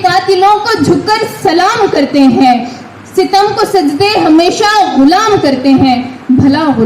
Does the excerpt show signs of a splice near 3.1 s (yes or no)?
no